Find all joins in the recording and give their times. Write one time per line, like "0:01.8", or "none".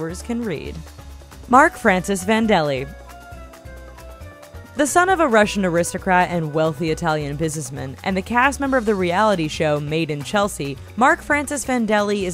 0:09.2